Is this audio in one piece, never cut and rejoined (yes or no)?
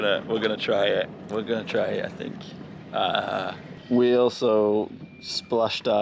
yes